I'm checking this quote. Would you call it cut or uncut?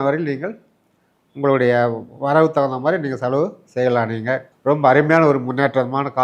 cut